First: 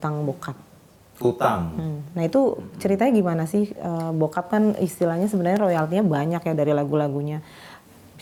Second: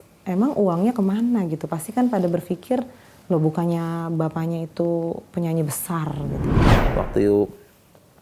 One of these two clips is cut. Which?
second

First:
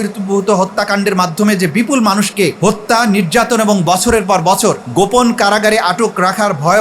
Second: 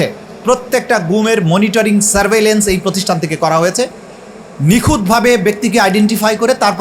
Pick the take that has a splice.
first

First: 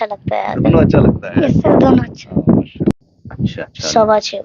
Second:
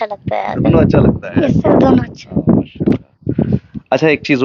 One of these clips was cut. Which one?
first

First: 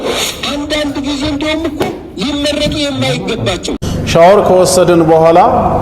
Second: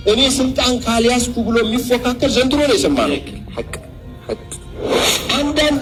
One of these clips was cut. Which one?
first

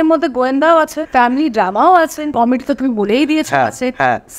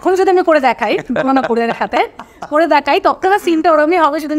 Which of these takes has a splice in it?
first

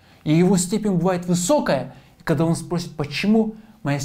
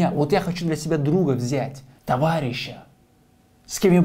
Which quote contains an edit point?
second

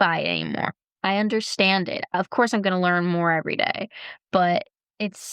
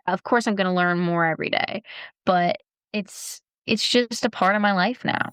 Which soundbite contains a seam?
first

